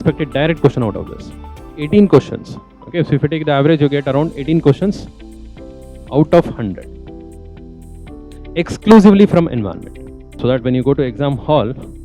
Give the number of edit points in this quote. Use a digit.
2